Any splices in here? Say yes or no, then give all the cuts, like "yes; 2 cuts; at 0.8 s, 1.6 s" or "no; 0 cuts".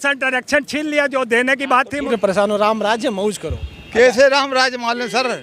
yes; 1 cut; at 2.0 s